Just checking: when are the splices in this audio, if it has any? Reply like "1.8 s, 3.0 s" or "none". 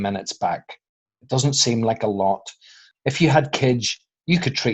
2.9 s